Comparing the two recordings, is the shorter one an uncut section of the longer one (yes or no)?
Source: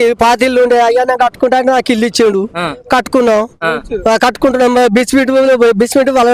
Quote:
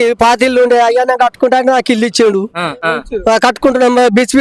no